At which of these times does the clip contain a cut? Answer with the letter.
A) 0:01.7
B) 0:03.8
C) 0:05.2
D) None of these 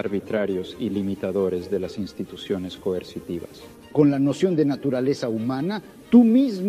B